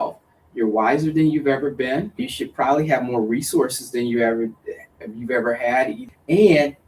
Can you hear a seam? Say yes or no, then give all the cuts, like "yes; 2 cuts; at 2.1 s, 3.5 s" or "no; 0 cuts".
yes; 2 cuts; at 2.3 s, 6.0 s